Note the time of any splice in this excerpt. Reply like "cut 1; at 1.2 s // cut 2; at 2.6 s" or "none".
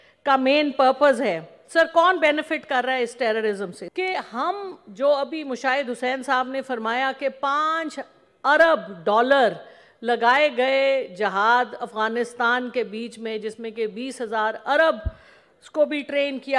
cut 1; at 3.8 s